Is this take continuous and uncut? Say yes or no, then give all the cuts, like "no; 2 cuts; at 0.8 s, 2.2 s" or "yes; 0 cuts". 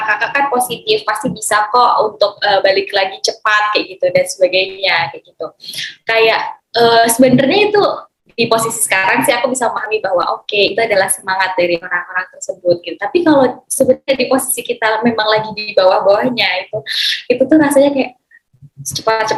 yes; 0 cuts